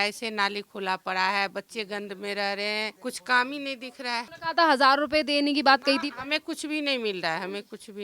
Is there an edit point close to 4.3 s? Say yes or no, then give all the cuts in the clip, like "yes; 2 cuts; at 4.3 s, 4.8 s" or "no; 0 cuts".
yes; 2 cuts; at 2.9 s, 4.3 s